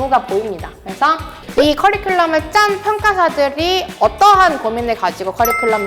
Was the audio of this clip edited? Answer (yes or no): yes